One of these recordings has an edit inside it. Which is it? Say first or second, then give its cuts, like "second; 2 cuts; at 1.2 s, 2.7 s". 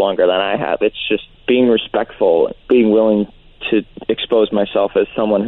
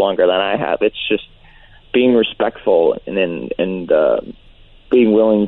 first; 3 cuts; at 1.3 s, 2.6 s, 3.9 s